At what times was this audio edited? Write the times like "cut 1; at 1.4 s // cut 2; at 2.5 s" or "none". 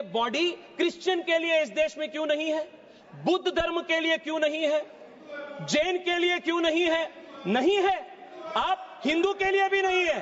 none